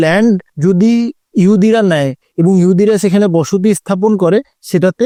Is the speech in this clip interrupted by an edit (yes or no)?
no